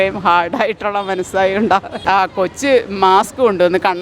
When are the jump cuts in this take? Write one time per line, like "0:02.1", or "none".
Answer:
0:02.0